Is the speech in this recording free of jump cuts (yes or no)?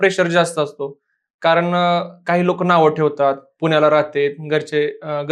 yes